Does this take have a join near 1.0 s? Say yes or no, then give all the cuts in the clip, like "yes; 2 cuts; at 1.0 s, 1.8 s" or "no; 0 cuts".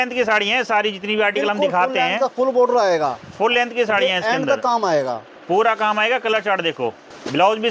no; 0 cuts